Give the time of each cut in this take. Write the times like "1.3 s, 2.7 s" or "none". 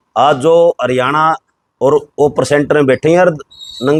none

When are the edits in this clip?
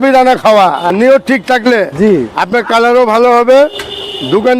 0.9 s

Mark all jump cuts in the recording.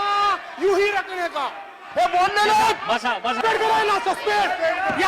3.4 s

